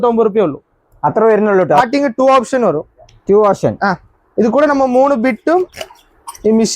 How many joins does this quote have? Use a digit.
1